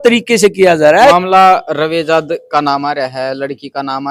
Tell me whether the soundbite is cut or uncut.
cut